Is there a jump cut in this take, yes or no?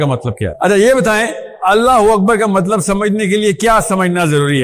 no